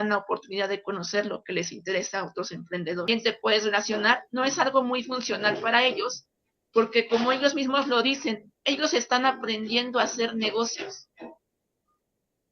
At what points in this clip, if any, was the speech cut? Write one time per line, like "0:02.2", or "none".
0:03.1